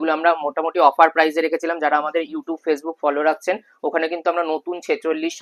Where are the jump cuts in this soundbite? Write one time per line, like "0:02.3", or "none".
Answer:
none

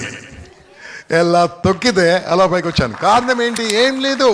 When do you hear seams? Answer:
none

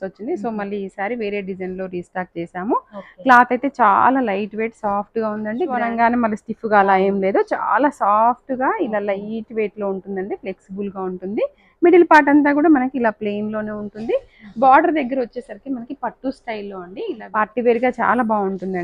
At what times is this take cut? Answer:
0:05.8
0:17.2

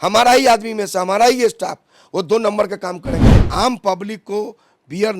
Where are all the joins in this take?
0:03.3

